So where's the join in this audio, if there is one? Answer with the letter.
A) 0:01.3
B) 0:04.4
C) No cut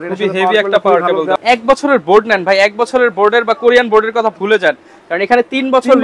A